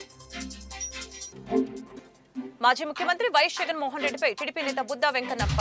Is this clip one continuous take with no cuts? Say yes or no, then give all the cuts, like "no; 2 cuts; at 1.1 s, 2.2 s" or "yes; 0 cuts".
no; 1 cut; at 1.2 s